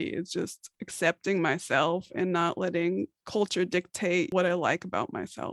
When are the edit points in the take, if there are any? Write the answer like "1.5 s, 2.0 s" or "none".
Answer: 4.3 s

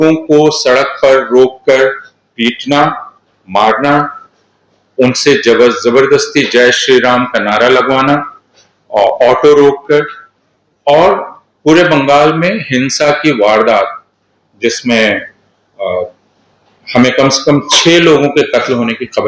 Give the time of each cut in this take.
none

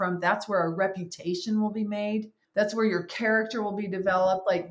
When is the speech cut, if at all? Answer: 2.5 s

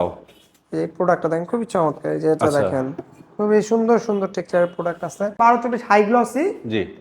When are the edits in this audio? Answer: 5.4 s

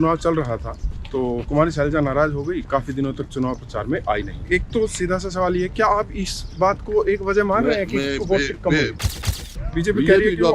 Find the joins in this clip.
1.4 s, 4.4 s, 9.0 s

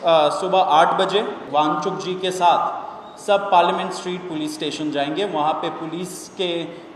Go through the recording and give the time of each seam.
1.4 s

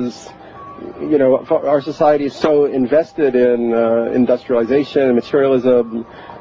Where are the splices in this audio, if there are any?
1.2 s

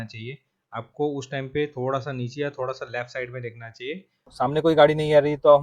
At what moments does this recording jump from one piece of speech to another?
4.3 s

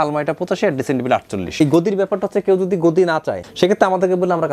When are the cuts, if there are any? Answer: 1.5 s, 3.4 s

